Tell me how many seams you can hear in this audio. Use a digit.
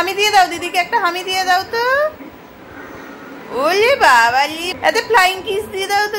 1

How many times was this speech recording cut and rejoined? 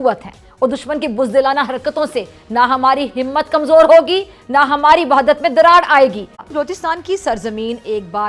1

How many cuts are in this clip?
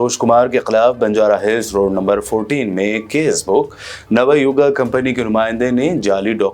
0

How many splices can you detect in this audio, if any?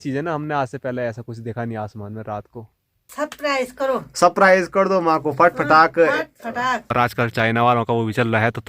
2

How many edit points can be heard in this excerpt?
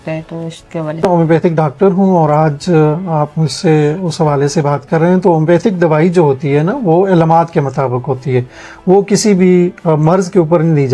1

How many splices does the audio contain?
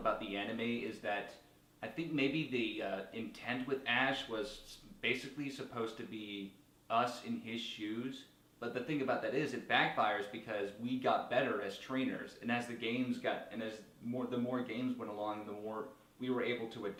0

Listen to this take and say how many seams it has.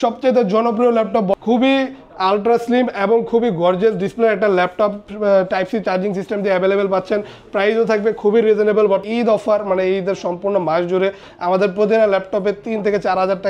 2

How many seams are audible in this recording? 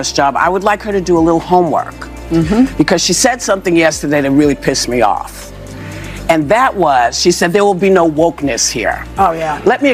0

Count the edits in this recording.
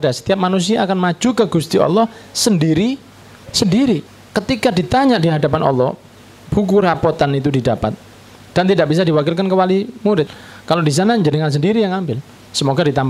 2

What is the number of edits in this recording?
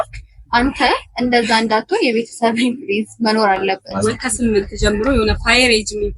1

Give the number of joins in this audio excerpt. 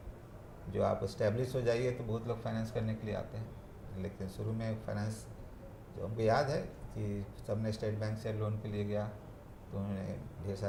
0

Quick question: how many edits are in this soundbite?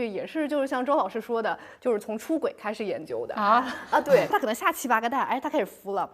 1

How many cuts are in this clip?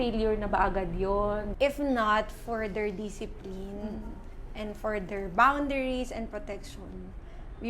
1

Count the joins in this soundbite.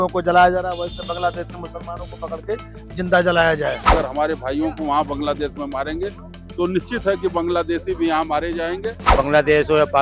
2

